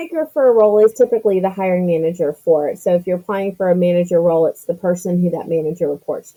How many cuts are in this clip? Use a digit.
0